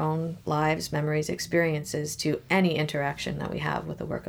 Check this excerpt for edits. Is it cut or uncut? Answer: uncut